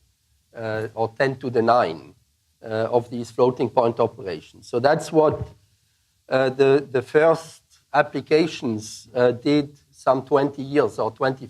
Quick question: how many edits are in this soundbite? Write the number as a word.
one